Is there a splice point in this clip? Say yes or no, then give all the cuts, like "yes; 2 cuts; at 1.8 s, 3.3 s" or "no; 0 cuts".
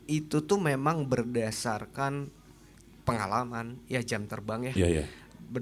no; 0 cuts